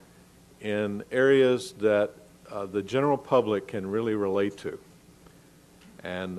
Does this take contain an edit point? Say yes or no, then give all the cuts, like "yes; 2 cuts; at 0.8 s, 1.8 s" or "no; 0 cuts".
yes; 1 cut; at 3.4 s